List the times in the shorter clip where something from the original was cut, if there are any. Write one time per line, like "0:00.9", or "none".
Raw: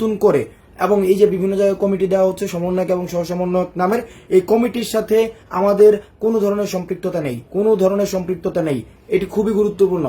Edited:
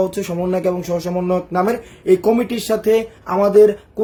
none